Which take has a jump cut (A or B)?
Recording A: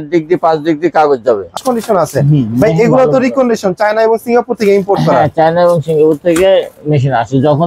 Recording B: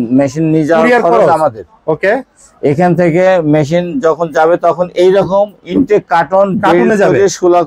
A